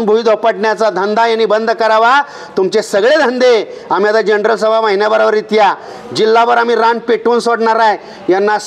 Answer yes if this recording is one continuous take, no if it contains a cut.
yes